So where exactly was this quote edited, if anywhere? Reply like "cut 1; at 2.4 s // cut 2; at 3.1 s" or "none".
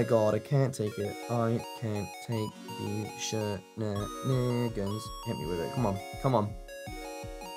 cut 1; at 1.1 s